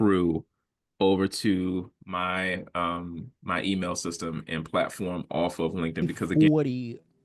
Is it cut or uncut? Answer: cut